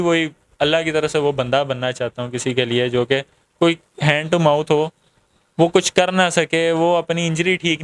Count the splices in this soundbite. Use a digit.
0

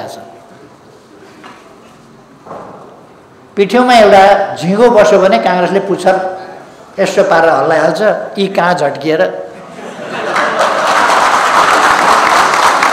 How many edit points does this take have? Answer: 0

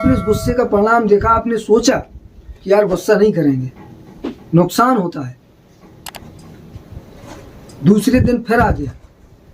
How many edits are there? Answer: 0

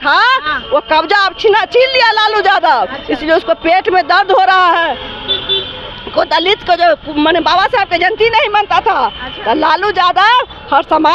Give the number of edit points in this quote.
0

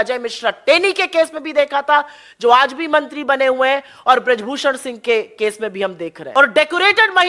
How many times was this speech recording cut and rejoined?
1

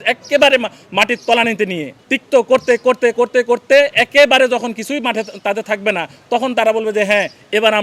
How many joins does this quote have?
1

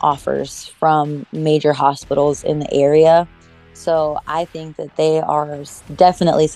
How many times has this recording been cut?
0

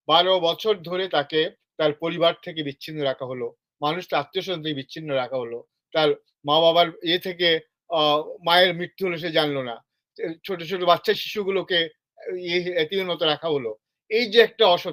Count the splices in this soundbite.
0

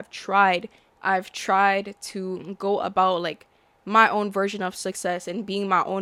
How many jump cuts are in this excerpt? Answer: 0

